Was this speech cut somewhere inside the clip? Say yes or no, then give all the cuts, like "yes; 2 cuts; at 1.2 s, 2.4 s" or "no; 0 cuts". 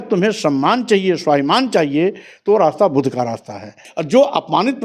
yes; 1 cut; at 3.9 s